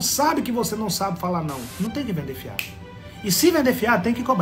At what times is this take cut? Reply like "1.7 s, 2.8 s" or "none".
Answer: 1.7 s

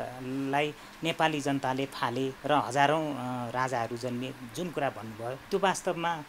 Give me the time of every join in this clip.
2.4 s, 5.4 s

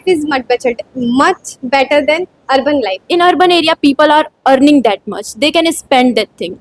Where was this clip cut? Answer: 3.0 s

